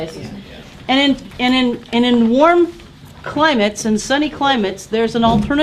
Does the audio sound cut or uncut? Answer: cut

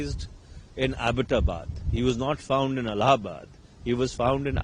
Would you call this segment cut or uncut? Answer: uncut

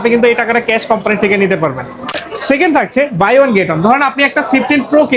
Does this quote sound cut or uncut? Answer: cut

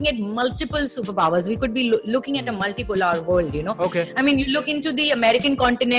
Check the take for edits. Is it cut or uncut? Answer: uncut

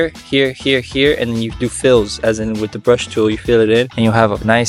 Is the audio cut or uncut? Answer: uncut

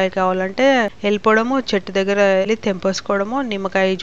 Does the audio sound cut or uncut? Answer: cut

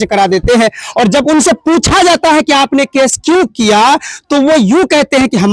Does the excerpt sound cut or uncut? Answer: uncut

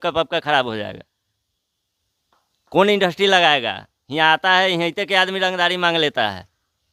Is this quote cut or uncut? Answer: uncut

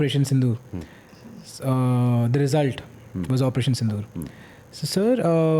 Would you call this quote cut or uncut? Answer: uncut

